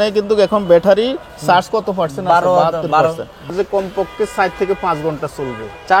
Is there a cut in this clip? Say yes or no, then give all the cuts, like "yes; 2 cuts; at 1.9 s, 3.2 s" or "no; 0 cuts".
yes; 1 cut; at 3.5 s